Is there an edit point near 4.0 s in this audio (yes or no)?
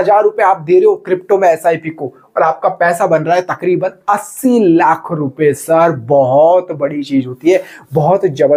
no